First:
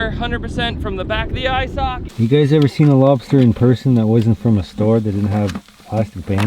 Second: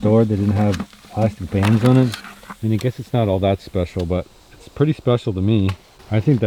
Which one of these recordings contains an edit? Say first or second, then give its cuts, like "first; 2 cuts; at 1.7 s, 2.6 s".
first; 1 cut; at 2.0 s